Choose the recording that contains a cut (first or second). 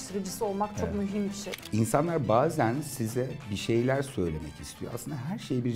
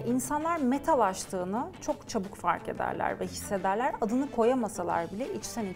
first